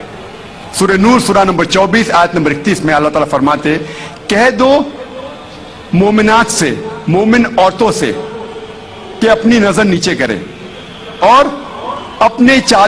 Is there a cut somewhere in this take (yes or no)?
no